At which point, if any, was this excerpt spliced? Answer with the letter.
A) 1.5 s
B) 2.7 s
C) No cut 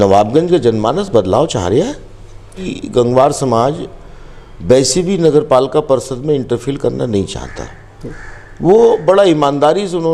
B